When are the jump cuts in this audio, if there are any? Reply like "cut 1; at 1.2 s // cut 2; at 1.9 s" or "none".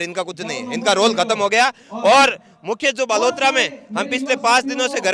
none